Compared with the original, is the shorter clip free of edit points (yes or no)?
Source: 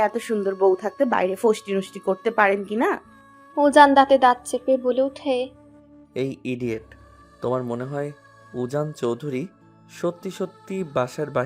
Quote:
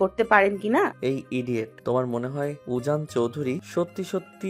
no